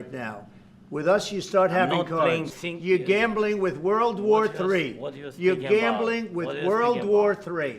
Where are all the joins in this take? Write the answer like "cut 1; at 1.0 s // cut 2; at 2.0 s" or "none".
cut 1; at 2.5 s

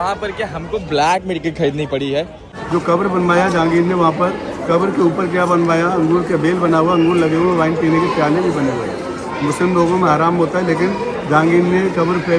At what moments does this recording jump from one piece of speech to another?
cut 1; at 2.4 s

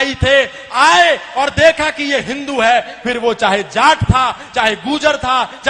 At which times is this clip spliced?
none

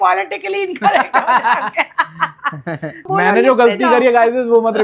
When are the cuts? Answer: cut 1; at 3.1 s

